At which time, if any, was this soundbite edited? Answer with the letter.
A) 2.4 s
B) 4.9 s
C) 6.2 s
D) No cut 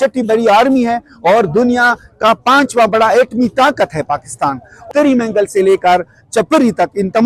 B